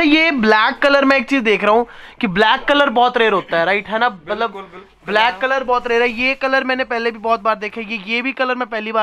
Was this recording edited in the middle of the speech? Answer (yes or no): no